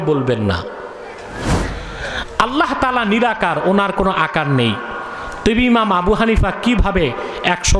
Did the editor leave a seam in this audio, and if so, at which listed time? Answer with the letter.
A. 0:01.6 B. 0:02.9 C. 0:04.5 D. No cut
A